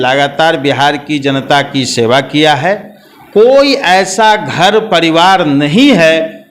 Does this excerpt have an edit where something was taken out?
no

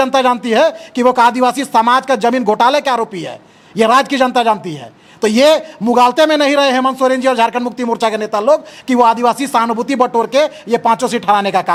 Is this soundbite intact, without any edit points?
yes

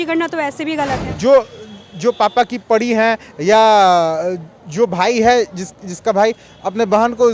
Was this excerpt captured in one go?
no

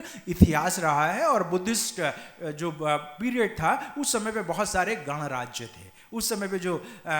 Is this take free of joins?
yes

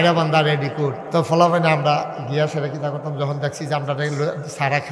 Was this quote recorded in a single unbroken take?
no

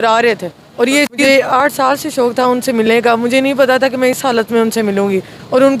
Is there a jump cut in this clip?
yes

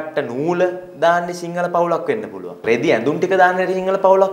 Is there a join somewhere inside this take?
yes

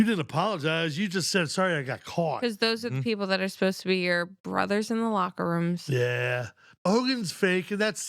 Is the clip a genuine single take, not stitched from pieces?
no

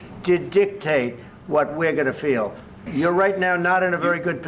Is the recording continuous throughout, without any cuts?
no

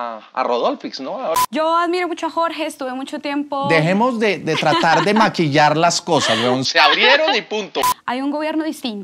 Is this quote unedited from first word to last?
no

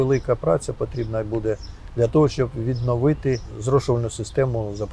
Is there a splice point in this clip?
yes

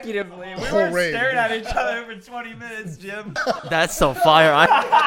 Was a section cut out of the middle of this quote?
yes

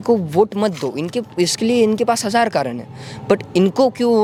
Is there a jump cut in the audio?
no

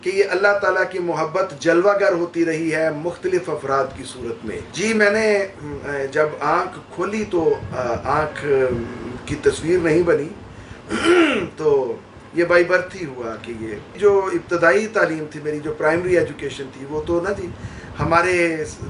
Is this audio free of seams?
yes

